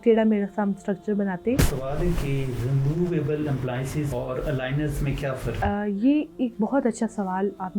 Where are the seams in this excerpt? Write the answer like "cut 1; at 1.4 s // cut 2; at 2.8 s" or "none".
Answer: cut 1; at 1.6 s // cut 2; at 4.1 s // cut 3; at 5.6 s